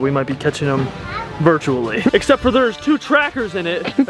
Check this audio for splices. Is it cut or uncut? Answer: cut